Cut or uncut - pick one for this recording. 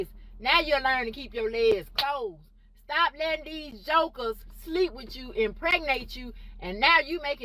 uncut